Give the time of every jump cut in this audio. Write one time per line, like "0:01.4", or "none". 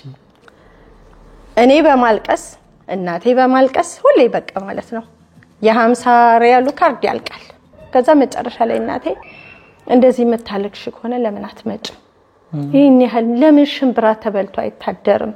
0:07.8